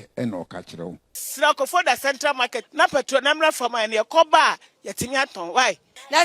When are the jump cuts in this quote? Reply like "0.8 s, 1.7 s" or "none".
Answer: 1.2 s